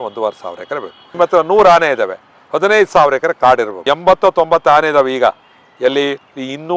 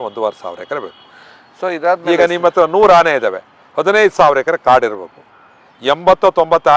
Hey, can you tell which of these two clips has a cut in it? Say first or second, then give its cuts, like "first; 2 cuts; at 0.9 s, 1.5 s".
first; 2 cuts; at 1.1 s, 3.7 s